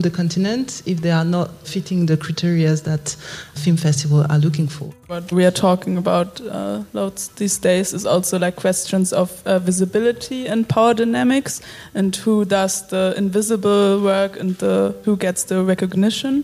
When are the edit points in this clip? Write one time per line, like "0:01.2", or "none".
0:01.7
0:03.5
0:05.3
0:15.0